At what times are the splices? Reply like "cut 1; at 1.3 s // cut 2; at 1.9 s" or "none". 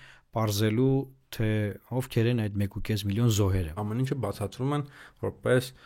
cut 1; at 3.8 s